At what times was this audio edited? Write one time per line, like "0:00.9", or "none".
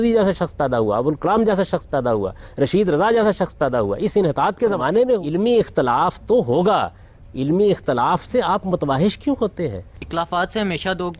0:10.0